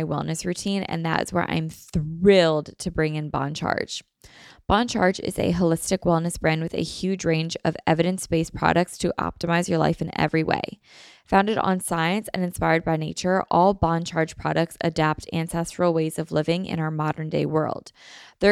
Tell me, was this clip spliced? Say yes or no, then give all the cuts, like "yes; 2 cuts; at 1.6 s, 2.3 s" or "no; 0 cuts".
no; 0 cuts